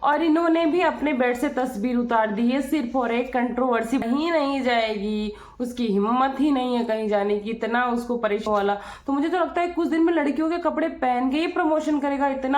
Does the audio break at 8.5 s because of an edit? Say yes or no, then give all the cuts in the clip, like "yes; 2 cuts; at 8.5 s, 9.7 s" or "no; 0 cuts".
yes; 2 cuts; at 4.0 s, 8.5 s